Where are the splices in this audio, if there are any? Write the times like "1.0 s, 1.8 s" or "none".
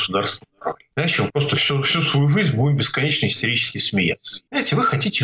0.8 s, 4.3 s